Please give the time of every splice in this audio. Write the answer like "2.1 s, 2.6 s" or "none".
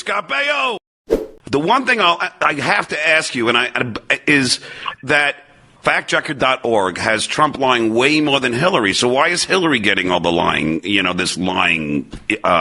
1.2 s